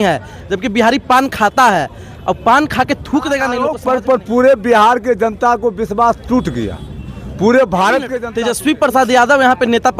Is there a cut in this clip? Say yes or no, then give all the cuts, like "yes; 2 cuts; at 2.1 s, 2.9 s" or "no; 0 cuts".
yes; 2 cuts; at 3.7 s, 8.2 s